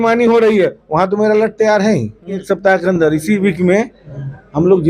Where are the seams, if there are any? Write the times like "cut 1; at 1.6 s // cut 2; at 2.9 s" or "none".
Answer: cut 1; at 2.5 s